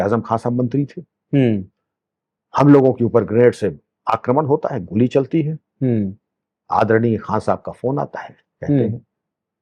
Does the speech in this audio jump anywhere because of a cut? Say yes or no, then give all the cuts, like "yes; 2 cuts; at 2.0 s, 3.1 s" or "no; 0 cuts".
no; 0 cuts